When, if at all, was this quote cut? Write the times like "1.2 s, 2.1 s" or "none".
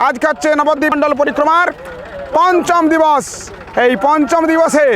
0.9 s

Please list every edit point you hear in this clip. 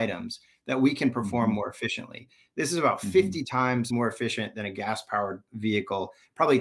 3.9 s, 5.5 s

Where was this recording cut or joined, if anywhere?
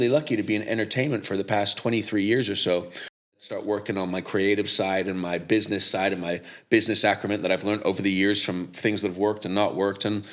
3.3 s

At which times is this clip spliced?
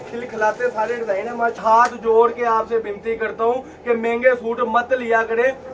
1.6 s

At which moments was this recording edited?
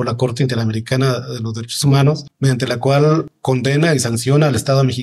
2.3 s, 3.3 s

